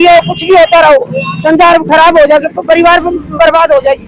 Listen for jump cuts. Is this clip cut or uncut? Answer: uncut